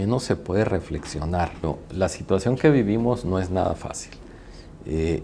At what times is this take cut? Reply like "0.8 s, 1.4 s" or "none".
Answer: 1.7 s